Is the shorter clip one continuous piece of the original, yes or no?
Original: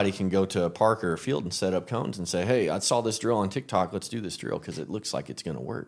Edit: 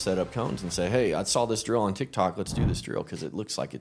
yes